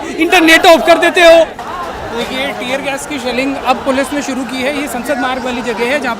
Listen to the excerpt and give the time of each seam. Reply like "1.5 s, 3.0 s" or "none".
1.7 s